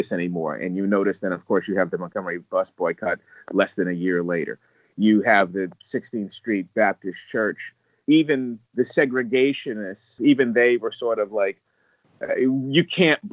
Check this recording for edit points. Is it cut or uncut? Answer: cut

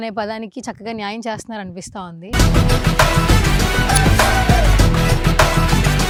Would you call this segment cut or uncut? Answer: uncut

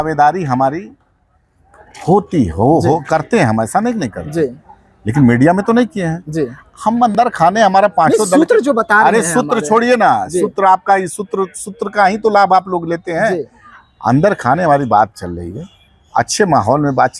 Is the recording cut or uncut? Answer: uncut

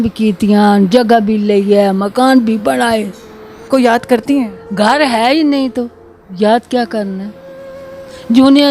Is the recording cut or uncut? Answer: cut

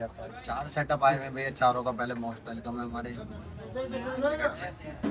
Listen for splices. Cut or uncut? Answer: uncut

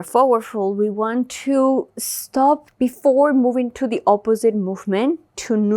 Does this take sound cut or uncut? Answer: cut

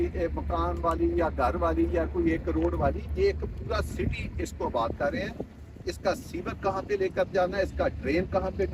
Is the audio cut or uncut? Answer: uncut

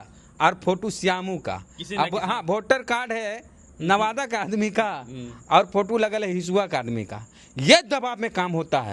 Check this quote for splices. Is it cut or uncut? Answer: uncut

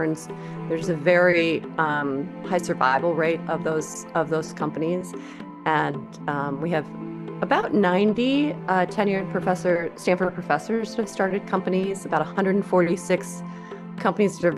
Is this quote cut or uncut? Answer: uncut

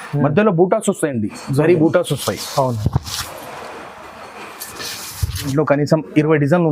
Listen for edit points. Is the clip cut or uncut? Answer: cut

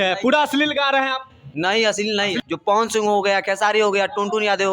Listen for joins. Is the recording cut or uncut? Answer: cut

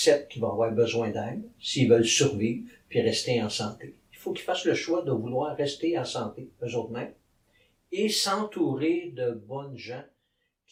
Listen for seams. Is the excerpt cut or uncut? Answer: uncut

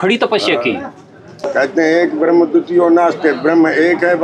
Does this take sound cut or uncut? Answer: cut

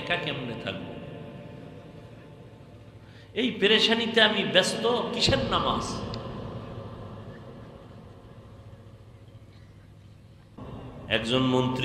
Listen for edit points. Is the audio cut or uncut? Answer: cut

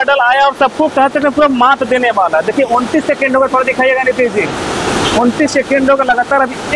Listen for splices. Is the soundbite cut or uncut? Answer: uncut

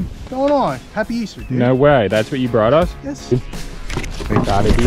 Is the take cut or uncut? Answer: cut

